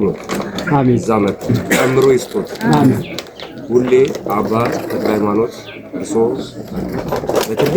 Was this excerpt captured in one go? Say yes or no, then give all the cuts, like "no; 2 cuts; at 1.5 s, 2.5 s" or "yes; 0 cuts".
no; 1 cut; at 1.5 s